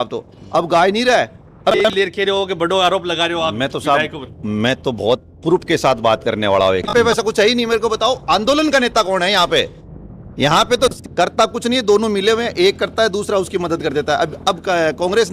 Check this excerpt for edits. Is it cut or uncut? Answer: cut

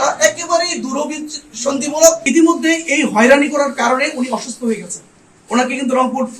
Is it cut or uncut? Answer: cut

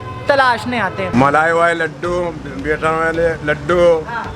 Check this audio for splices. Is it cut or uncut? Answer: cut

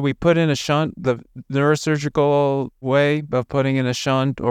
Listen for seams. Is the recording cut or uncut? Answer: uncut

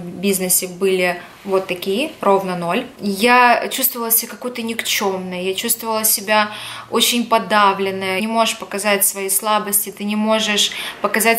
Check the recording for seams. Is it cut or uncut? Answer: cut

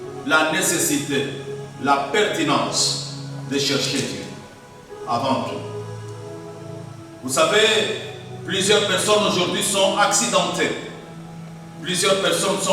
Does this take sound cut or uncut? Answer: uncut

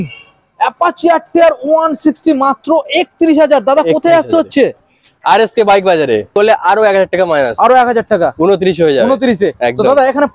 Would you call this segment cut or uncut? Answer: cut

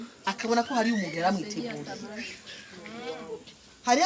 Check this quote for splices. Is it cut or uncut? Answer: uncut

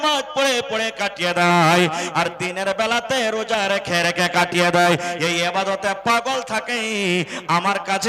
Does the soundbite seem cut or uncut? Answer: uncut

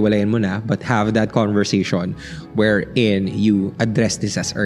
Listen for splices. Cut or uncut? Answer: uncut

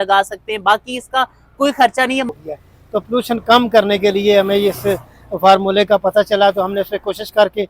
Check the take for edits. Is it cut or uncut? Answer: cut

